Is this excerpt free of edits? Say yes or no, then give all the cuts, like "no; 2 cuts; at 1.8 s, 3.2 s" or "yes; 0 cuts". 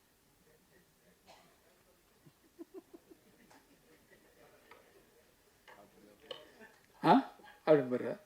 yes; 0 cuts